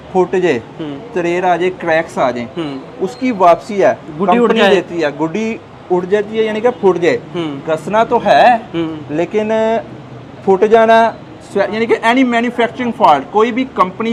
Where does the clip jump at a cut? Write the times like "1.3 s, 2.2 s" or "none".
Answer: none